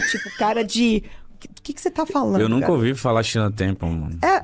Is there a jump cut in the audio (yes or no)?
no